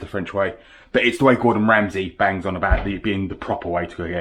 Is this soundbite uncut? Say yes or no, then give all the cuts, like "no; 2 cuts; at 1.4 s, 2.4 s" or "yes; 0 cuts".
yes; 0 cuts